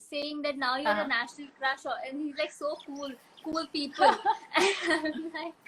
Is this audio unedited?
yes; 0 cuts

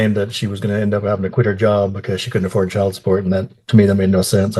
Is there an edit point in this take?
no; 0 cuts

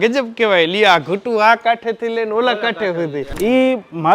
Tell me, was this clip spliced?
yes; 1 cut; at 3.2 s

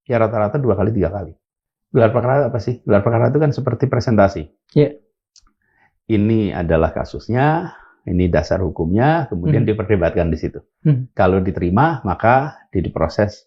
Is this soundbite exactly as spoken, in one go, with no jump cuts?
yes; 0 cuts

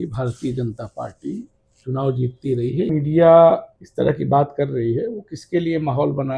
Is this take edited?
yes; 2 cuts; at 2.9 s, 3.8 s

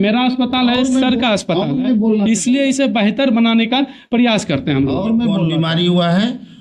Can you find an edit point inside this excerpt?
yes; 1 cut; at 5.5 s

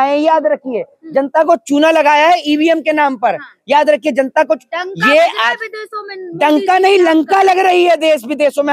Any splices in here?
no; 0 cuts

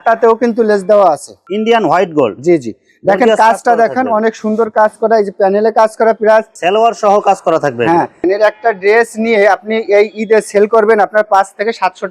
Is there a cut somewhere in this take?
yes; 3 cuts; at 1.4 s, 6.6 s, 8.2 s

